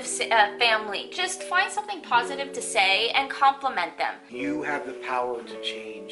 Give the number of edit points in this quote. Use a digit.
1